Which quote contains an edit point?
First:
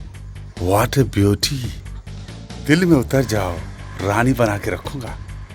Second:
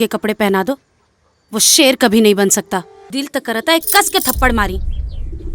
second; 1 cut; at 3.0 s

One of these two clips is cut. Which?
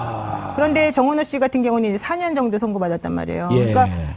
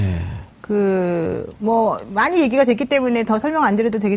first; 1 cut; at 3.0 s

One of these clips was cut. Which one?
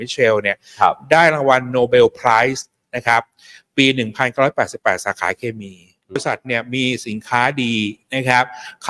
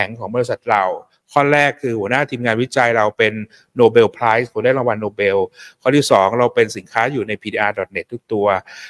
first; 1 cut; at 6.2 s

